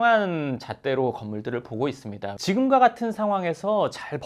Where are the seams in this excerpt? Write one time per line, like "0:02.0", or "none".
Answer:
0:02.3